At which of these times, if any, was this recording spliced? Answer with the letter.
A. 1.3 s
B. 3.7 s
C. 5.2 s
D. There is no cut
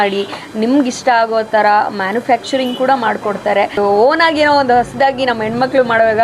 B